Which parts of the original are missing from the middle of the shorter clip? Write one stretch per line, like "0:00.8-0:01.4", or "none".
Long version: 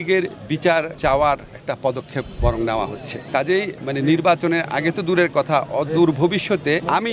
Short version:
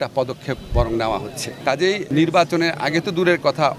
0:03.8-0:04.0